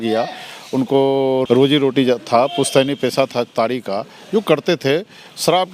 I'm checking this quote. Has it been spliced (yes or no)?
yes